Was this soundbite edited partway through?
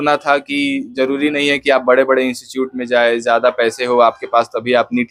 no; 0 cuts

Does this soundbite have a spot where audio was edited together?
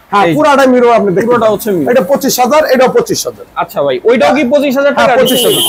no; 0 cuts

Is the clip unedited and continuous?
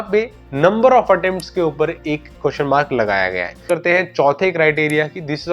no; 1 cut; at 3.6 s

